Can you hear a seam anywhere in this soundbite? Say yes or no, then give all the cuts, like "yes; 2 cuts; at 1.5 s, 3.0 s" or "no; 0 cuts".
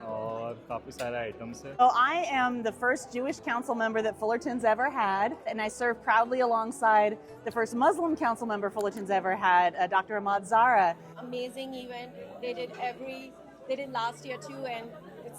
yes; 3 cuts; at 1.8 s, 5.6 s, 11.1 s